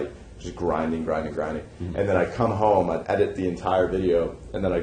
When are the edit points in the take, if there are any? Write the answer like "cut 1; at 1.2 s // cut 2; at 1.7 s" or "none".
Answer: none